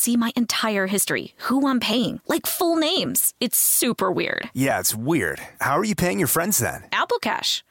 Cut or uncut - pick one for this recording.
uncut